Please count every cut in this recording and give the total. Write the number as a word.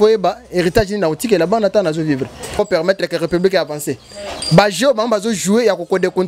one